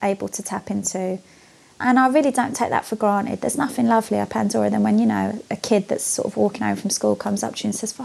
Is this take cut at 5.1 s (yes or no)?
no